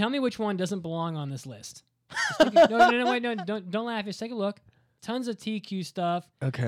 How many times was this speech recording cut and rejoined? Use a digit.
1